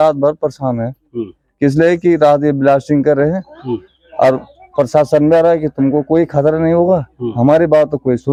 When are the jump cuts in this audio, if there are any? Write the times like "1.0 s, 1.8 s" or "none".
none